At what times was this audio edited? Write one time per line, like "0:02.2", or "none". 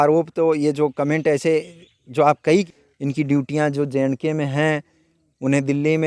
0:02.7